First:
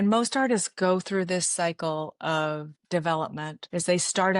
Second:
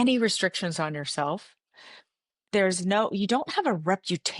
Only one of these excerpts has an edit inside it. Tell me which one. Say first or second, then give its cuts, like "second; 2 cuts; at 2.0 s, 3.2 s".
first; 2 cuts; at 2.7 s, 3.5 s